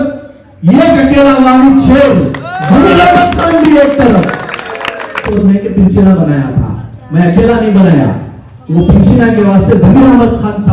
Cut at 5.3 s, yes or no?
yes